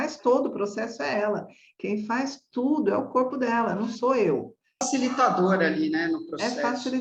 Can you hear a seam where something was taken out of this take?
yes; 1 cut; at 4.9 s

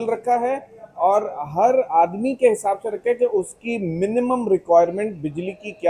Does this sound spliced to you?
no; 0 cuts

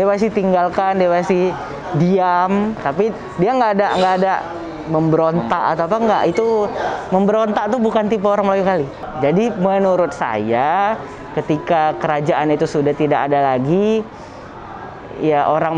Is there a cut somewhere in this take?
no; 0 cuts

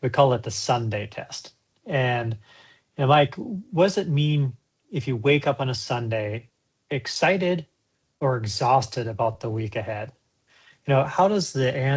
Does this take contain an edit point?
no; 0 cuts

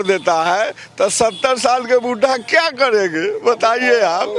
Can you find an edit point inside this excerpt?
no; 0 cuts

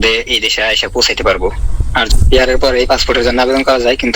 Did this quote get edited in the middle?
yes; 1 cut; at 2.1 s

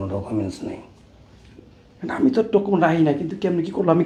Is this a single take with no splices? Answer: yes; 0 cuts

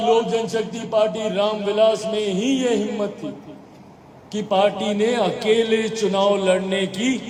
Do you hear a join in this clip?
no; 0 cuts

